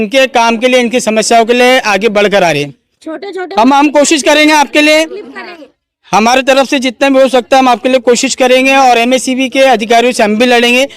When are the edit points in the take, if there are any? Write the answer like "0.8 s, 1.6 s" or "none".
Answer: none